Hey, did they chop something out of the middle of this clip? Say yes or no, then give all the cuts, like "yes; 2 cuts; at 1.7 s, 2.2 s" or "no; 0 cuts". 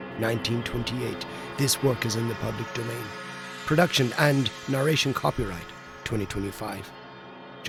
no; 0 cuts